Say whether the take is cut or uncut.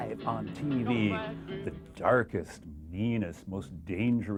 uncut